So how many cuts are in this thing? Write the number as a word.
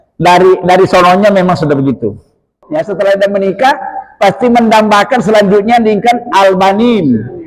one